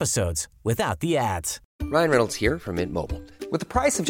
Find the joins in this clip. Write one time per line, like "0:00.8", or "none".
0:01.6